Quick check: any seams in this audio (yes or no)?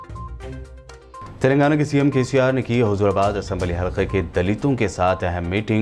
yes